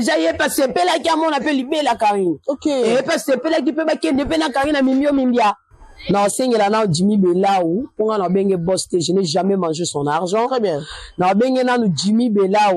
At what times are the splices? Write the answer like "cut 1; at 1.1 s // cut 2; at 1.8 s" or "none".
cut 1; at 5.7 s

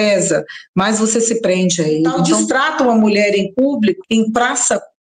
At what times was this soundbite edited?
cut 1; at 2.2 s // cut 2; at 4.0 s

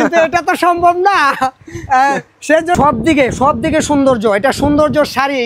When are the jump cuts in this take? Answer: cut 1; at 2.8 s

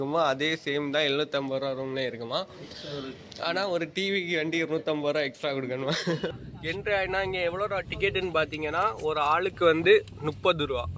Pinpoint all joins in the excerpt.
cut 1; at 6.3 s

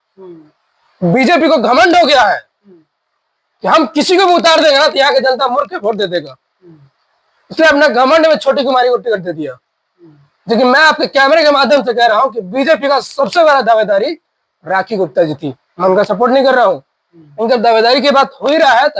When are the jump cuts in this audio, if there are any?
none

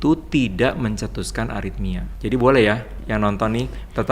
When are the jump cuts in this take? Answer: cut 1; at 2.1 s // cut 2; at 2.9 s

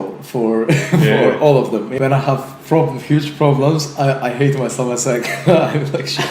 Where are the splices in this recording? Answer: cut 1; at 1.9 s

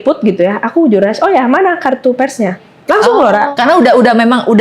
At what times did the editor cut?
cut 1; at 3.5 s

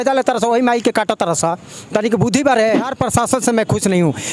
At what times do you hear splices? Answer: cut 1; at 2.9 s

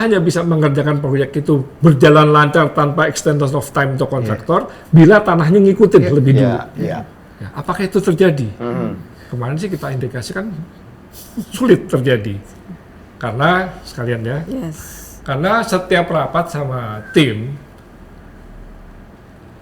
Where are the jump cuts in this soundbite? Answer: none

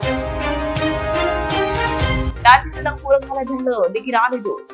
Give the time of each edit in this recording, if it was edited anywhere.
cut 1; at 2.3 s

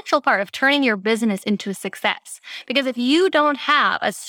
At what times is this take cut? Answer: none

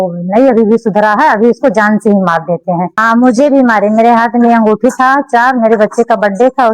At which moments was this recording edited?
cut 1; at 2.9 s

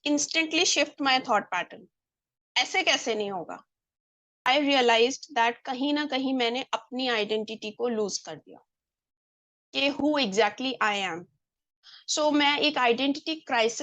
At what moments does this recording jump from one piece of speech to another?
cut 1; at 4.5 s

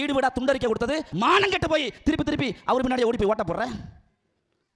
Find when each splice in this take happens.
cut 1; at 1.1 s

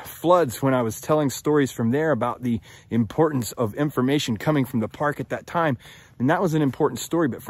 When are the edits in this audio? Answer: cut 1; at 3.5 s

